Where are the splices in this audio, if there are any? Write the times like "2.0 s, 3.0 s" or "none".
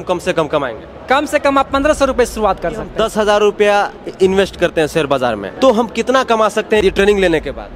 2.9 s, 5.5 s, 6.8 s

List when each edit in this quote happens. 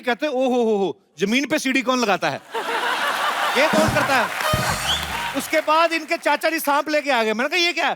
5.3 s

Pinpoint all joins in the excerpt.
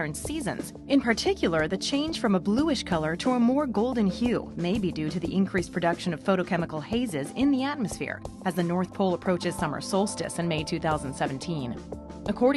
8.2 s

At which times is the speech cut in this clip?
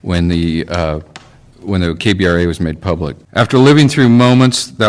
3.2 s

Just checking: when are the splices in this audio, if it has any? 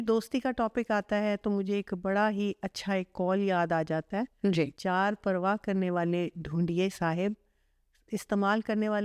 none

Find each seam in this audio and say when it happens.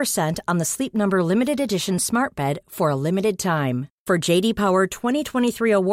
none

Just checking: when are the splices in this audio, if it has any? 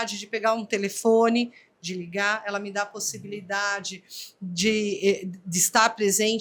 none

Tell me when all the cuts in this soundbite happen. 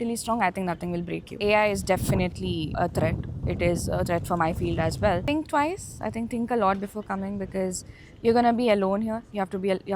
1.4 s, 2.7 s, 5.2 s

